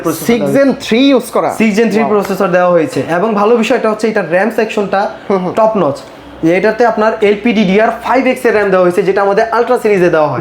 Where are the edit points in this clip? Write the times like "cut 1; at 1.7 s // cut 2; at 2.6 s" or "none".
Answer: none